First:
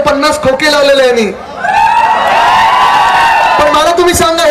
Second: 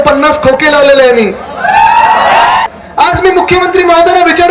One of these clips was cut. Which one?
second; 1 cut; at 2.6 s

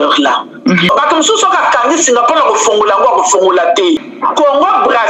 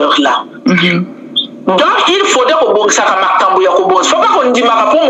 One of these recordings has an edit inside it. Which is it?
first; 2 cuts; at 0.9 s, 4.0 s

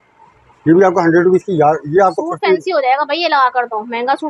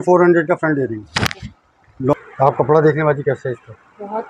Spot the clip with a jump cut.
second; 1 cut; at 2.1 s

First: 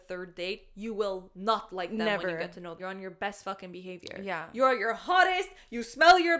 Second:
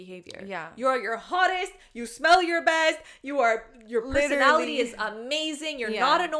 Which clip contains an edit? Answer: first; 1 cut; at 2.8 s

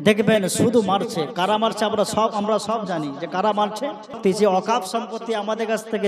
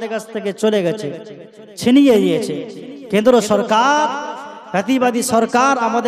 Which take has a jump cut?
first; 1 cut; at 4.2 s

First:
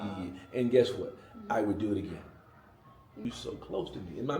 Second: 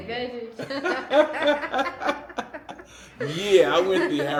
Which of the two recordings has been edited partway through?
first; 1 cut; at 3.2 s

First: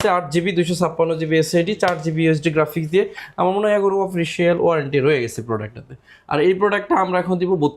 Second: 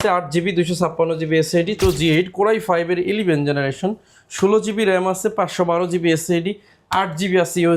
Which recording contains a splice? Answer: second; 1 cut; at 1.8 s

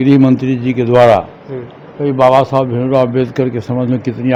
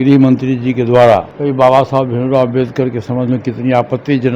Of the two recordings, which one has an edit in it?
second; 1 cut; at 1.3 s

